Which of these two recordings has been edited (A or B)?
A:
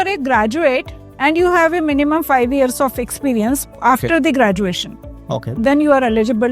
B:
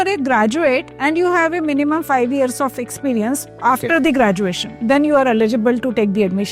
B